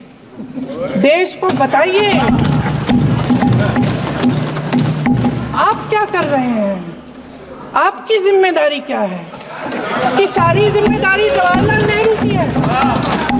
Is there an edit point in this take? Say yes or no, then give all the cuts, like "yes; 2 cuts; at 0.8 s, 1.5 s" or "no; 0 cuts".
no; 0 cuts